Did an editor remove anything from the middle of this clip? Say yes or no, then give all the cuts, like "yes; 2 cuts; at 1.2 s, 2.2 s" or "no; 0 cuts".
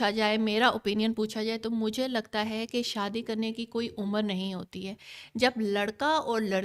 no; 0 cuts